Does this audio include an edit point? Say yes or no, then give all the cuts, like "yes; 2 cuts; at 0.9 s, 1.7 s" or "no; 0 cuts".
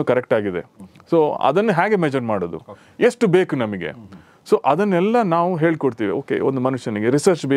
no; 0 cuts